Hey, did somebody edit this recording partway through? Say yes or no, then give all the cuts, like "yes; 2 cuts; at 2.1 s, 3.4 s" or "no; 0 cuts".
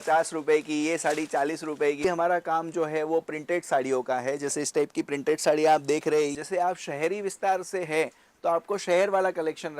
yes; 2 cuts; at 2.0 s, 6.4 s